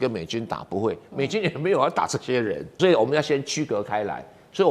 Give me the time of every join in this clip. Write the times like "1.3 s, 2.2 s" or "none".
2.8 s